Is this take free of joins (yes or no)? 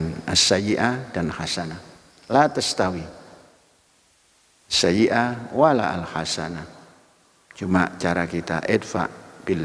yes